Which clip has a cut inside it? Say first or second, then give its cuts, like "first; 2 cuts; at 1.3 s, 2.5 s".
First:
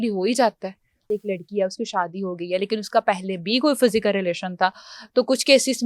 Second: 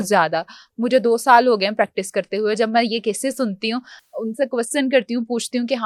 first; 1 cut; at 1.1 s